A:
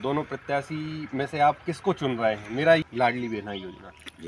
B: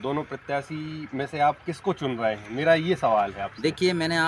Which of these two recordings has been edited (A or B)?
A